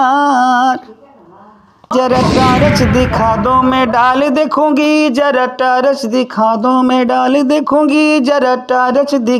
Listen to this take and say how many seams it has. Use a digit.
1